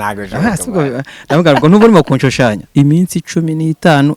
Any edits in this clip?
yes; 1 cut; at 2.6 s

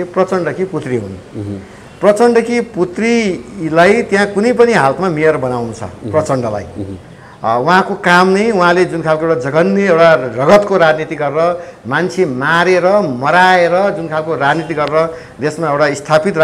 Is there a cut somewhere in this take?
no; 0 cuts

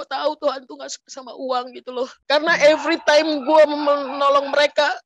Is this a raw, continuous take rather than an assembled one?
no; 1 cut; at 2.2 s

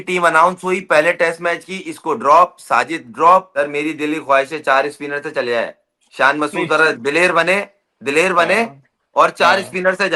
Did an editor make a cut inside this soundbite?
yes; 1 cut; at 3.5 s

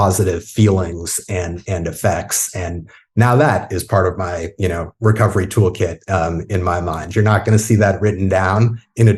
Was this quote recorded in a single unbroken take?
yes; 0 cuts

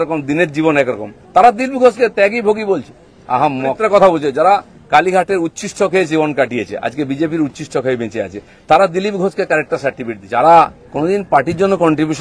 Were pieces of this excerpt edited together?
yes; 2 cuts; at 3.8 s, 10.1 s

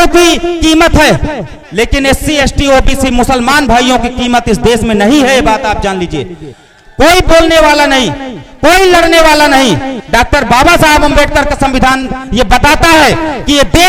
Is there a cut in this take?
yes; 1 cut; at 1.6 s

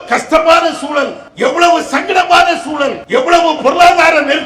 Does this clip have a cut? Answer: yes; 2 cuts; at 1.2 s, 3.0 s

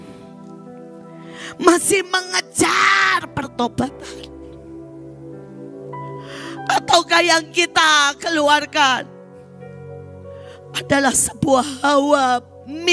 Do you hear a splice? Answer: no; 0 cuts

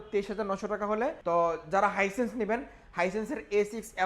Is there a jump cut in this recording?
yes; 1 cut; at 1.2 s

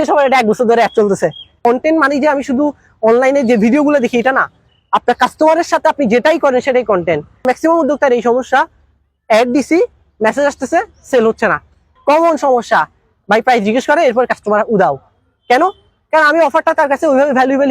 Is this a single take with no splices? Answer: no; 3 cuts; at 1.5 s, 7.5 s, 11.9 s

